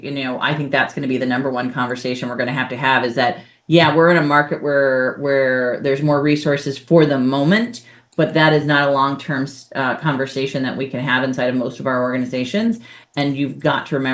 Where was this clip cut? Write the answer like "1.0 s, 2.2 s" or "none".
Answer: none